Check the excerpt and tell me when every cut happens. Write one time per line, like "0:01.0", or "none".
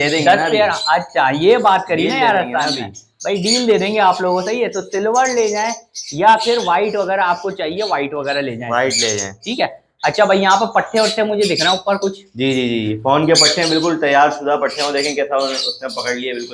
none